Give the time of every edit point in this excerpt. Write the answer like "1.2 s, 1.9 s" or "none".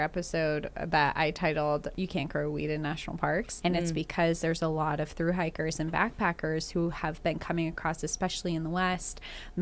1.9 s, 3.5 s

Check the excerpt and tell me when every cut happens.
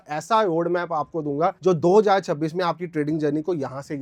none

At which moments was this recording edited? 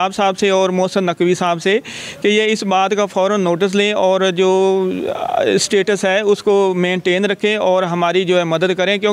none

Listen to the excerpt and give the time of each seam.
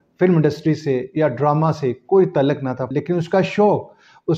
2.9 s

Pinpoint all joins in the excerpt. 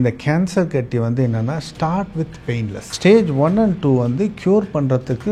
2.8 s

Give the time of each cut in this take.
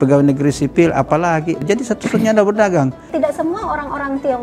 1.6 s, 3.1 s

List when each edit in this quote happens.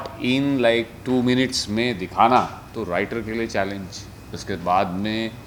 none

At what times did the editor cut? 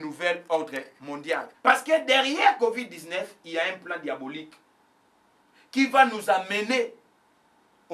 1.5 s

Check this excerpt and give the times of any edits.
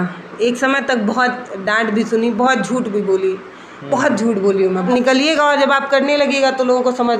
4.8 s

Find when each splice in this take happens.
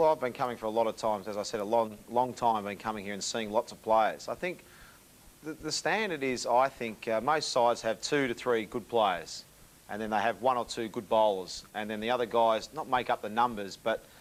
none

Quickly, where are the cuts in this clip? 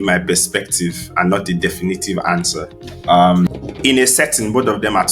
3.5 s

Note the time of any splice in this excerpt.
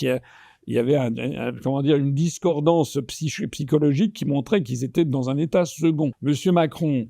6.2 s

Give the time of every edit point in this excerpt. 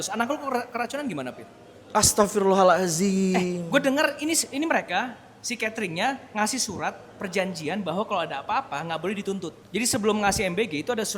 9.6 s

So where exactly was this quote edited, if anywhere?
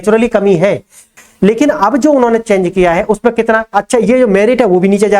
1.1 s

